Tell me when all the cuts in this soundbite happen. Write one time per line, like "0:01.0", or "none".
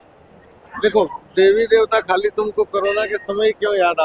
none